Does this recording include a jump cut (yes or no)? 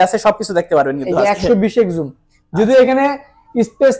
no